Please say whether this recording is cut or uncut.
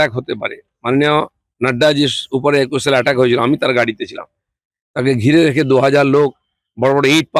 uncut